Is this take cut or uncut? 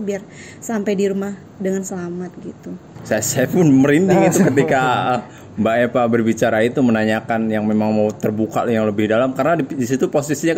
cut